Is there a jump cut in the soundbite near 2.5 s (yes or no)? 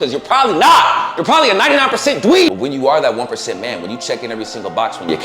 yes